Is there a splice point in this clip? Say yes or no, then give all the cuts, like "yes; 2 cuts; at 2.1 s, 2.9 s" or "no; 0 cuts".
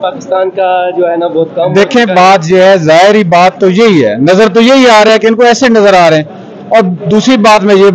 no; 0 cuts